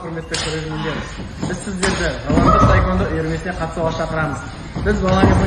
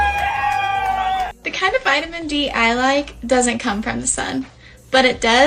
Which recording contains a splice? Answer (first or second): second